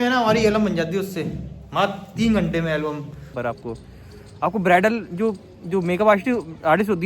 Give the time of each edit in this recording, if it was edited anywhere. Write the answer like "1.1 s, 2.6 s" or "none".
3.4 s